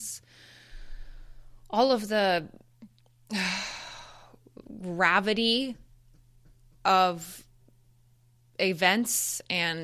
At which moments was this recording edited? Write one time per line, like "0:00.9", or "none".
none